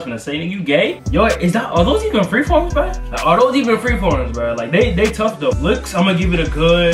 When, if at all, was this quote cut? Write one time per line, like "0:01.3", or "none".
none